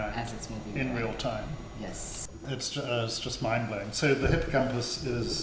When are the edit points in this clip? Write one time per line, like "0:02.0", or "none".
0:02.1